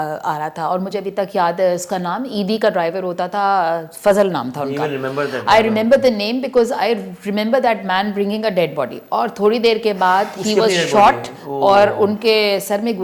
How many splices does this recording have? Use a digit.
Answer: 0